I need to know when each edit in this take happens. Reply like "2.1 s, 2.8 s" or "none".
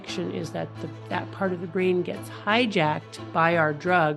none